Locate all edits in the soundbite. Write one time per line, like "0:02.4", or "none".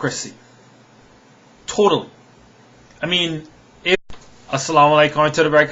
none